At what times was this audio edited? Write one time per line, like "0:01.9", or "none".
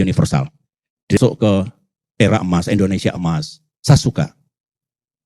0:01.2